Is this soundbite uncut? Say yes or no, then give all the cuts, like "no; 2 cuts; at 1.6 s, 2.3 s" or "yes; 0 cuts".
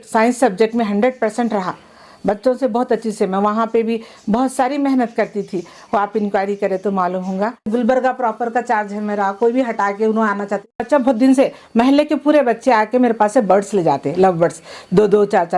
no; 2 cuts; at 7.7 s, 10.8 s